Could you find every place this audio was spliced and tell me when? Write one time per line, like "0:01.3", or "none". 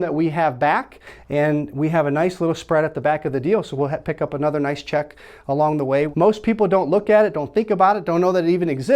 0:06.1